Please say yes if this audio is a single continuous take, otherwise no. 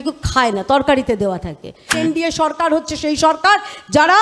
no